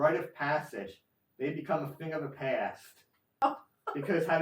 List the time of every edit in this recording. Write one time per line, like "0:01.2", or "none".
0:03.4